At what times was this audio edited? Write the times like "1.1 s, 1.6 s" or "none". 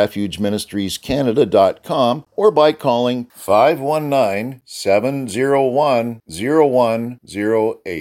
2.3 s